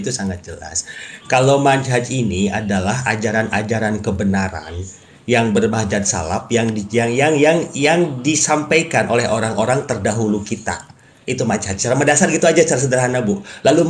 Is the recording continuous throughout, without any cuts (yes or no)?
yes